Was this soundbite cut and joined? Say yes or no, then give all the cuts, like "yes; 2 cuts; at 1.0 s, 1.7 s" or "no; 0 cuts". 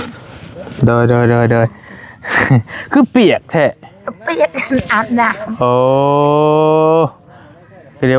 no; 0 cuts